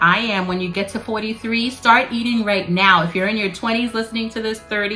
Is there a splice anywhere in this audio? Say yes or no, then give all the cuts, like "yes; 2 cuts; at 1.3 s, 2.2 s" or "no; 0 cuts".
no; 0 cuts